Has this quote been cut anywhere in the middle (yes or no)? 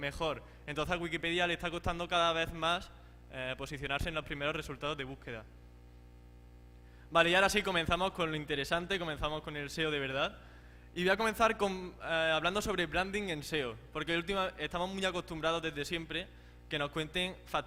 no